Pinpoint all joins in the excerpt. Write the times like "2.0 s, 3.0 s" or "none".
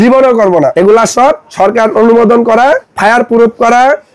0.7 s, 1.5 s, 2.9 s